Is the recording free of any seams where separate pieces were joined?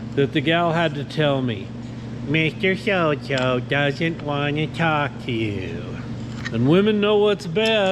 no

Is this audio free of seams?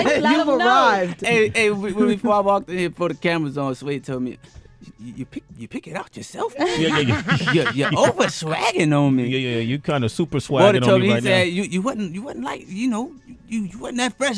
no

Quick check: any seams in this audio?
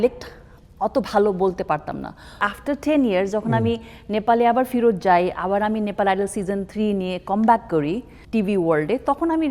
yes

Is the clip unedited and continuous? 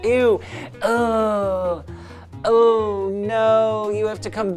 yes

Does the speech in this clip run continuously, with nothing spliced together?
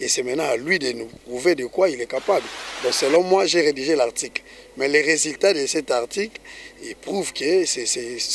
no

